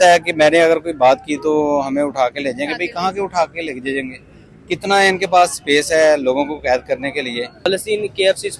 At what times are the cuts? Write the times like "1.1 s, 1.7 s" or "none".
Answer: 7.7 s